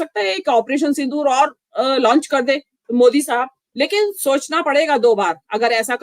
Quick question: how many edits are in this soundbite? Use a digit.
1